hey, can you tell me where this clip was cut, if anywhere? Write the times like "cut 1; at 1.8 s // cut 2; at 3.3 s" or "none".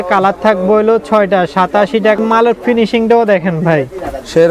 cut 1; at 2.2 s